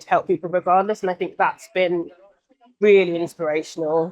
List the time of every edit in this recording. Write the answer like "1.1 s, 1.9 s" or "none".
none